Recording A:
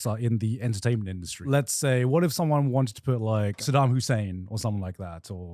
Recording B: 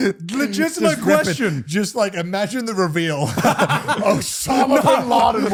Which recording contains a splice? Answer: A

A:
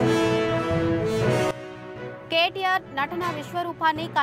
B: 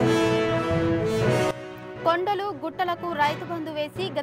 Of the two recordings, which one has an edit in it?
B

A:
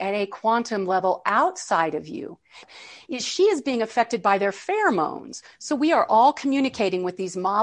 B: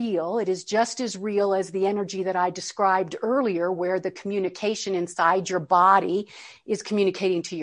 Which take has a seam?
A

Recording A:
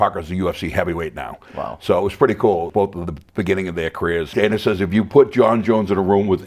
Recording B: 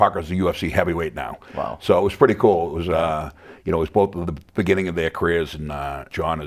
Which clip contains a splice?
A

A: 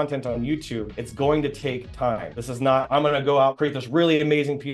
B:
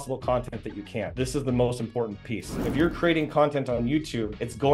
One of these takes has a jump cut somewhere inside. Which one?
B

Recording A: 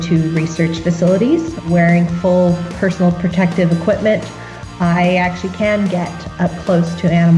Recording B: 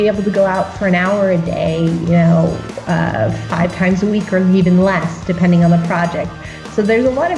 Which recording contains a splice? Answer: A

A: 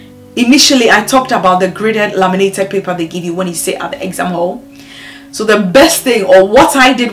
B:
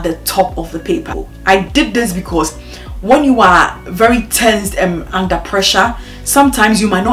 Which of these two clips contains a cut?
B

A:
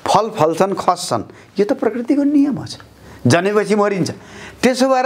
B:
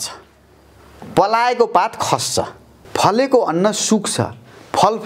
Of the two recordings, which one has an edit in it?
B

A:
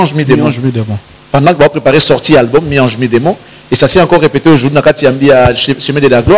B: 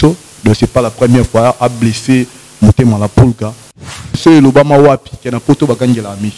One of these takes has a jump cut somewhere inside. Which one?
B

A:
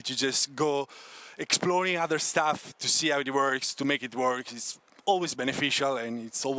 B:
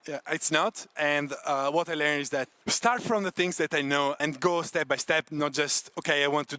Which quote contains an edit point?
B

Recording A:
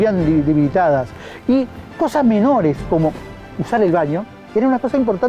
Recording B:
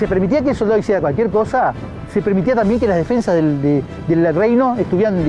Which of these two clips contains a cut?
B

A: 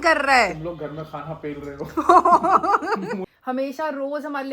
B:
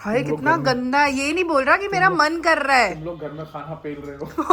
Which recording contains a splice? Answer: A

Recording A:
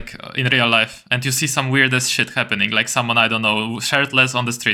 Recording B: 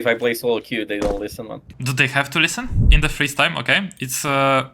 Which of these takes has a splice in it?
B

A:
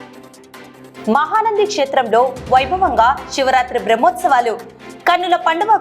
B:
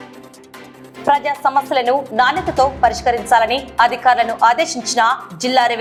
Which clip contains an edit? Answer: A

